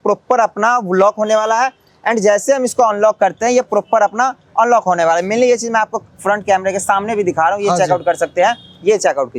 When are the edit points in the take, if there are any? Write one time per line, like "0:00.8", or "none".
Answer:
none